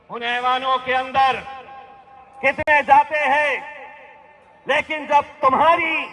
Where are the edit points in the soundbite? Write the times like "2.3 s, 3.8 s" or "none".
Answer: none